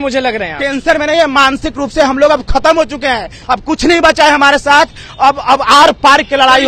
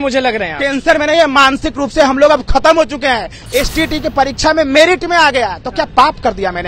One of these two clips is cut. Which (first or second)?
second